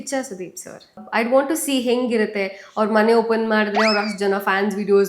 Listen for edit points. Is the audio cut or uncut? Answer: cut